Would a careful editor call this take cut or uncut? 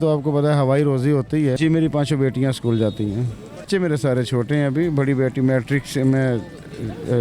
cut